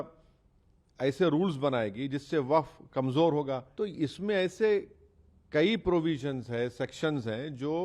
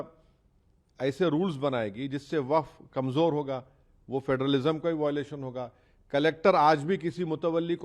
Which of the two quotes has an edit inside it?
first; 1 cut; at 3.7 s

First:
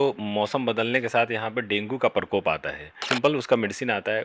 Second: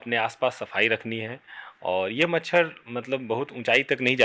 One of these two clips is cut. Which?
first; 1 cut; at 3.0 s

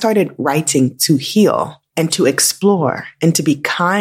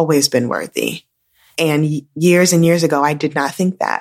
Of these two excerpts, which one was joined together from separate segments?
first; 1 cut; at 1.8 s

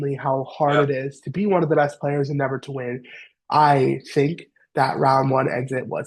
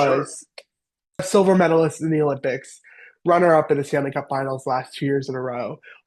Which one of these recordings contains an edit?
second; 1 cut; at 1.3 s

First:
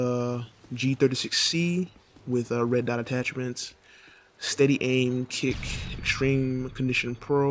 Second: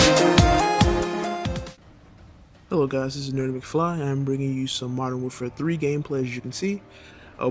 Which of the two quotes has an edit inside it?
first; 1 cut; at 2.1 s

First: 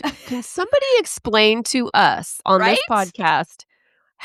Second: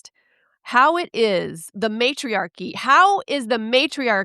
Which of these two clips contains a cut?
second; 1 cut; at 1.7 s

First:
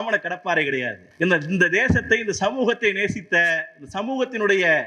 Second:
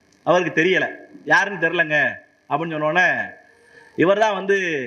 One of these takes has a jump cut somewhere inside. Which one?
first; 1 cut; at 1.0 s

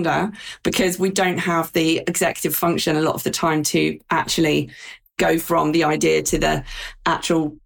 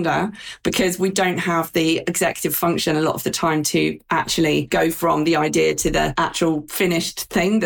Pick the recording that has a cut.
second; 2 cuts; at 4.7 s, 6.4 s

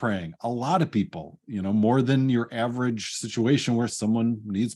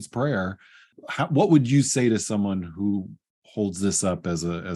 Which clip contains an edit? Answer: second; 1 cut; at 1.0 s

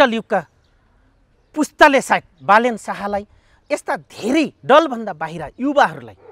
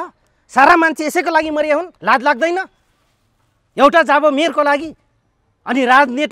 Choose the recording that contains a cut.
second; 1 cut; at 1.9 s

